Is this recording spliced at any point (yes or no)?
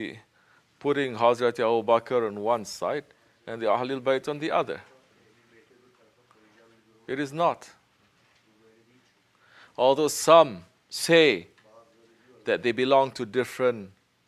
yes